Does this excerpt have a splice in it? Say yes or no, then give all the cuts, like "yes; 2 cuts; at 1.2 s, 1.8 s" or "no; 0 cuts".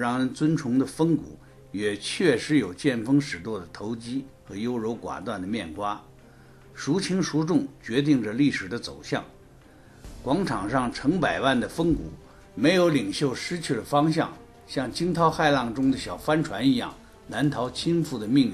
yes; 1 cut; at 16.4 s